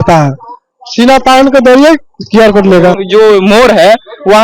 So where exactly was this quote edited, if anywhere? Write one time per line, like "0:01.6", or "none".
0:03.0